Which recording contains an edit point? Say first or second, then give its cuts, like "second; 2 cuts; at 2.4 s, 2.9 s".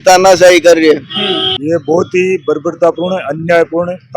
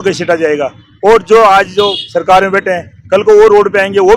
first; 1 cut; at 1.6 s